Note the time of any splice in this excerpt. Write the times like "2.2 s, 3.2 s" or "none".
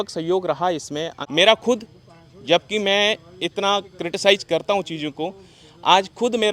1.2 s

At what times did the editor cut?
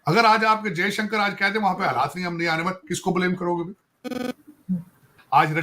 none

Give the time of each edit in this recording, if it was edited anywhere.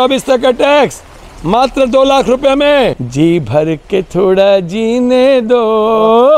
3.0 s

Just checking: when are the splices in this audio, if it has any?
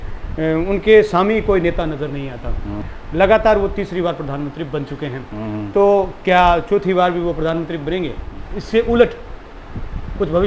2.9 s, 8.4 s

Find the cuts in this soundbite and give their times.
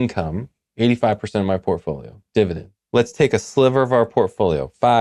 2.7 s

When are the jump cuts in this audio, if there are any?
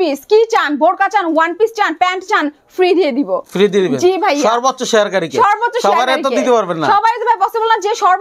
none

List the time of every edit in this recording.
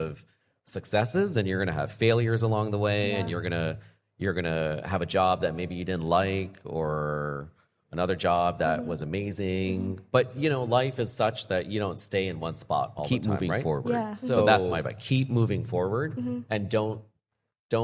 14.5 s

